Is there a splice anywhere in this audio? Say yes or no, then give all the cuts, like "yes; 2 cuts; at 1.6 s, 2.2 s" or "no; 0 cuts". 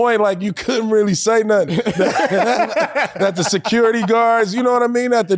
no; 0 cuts